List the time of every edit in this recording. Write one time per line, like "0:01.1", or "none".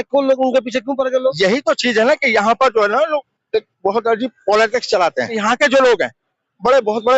0:05.4